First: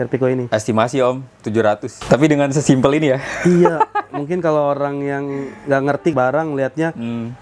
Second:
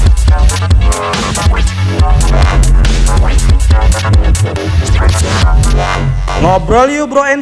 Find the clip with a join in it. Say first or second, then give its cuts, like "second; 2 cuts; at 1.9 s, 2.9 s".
second; 1 cut; at 6.4 s